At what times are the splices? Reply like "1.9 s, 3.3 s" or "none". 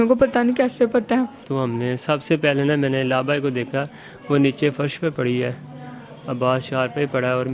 1.5 s